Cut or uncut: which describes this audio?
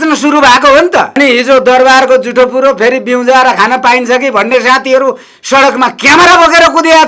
cut